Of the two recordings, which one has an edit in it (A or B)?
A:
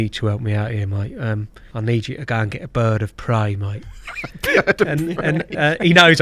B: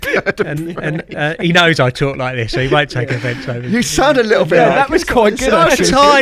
A